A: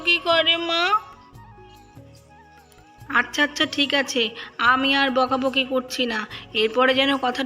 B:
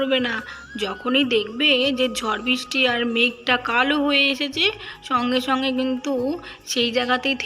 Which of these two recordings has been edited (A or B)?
A